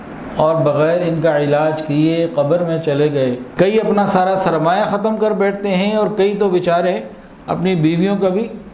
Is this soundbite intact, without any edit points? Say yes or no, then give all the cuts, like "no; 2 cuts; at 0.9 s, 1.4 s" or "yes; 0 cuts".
no; 1 cut; at 3.4 s